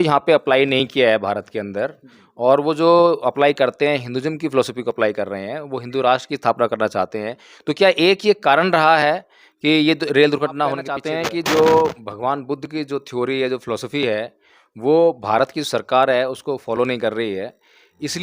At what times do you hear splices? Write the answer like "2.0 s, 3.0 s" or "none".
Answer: 11.1 s